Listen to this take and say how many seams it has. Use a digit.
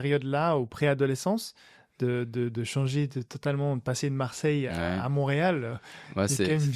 0